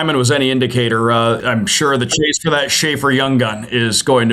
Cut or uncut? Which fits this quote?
cut